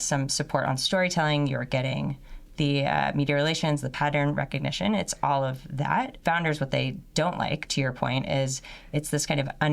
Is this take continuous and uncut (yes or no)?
no